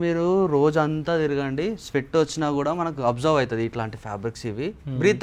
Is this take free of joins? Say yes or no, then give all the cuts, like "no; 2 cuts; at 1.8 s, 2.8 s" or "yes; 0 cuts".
yes; 0 cuts